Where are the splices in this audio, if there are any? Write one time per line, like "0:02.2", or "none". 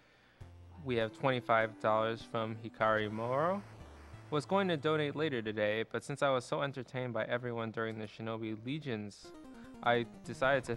0:02.2